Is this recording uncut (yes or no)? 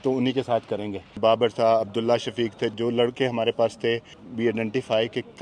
no